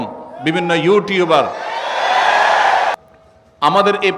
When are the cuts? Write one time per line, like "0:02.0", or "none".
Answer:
0:02.9